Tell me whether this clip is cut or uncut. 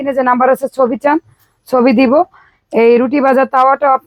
uncut